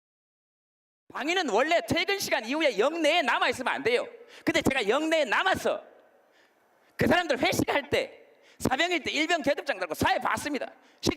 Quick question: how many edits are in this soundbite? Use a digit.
1